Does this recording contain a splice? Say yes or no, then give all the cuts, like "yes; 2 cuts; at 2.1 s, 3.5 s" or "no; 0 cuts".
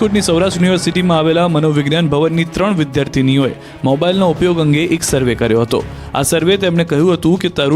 yes; 1 cut; at 3.1 s